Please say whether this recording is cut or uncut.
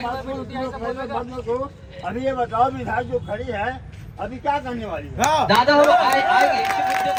uncut